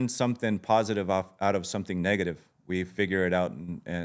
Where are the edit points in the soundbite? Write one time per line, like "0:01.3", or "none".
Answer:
none